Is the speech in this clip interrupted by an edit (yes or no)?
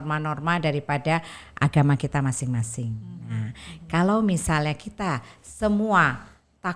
no